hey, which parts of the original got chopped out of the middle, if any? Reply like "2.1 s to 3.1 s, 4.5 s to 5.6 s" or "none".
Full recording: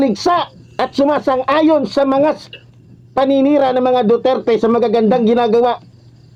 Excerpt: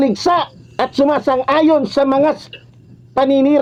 none